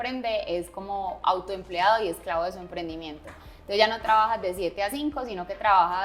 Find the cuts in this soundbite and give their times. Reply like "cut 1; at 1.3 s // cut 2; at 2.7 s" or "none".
none